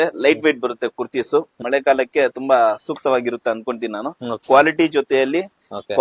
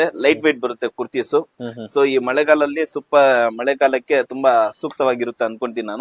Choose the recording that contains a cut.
first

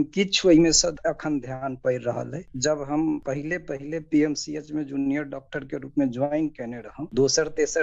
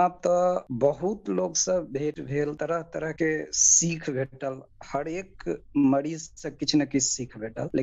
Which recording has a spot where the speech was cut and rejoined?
first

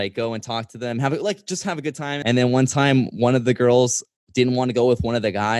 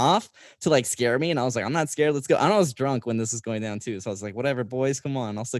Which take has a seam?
first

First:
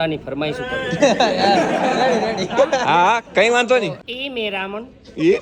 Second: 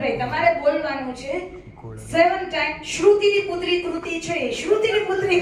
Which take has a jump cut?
first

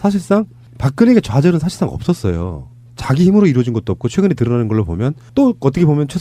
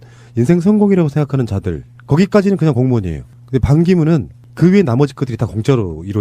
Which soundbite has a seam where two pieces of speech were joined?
second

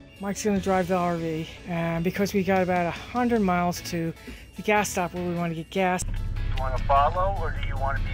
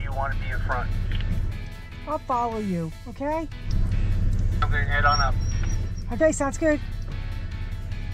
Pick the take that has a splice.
first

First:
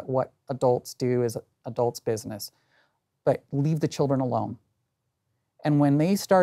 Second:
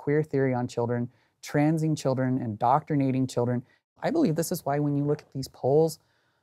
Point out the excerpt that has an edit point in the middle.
second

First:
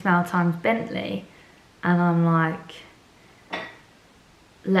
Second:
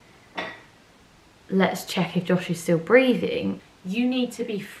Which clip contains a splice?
second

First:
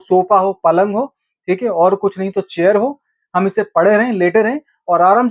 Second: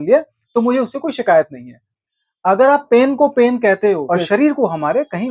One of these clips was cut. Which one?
second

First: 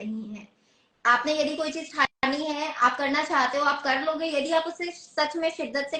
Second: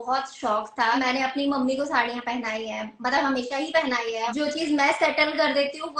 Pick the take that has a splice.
second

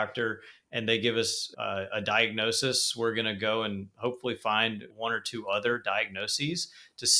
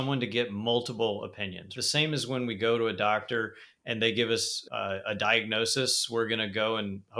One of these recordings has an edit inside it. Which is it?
second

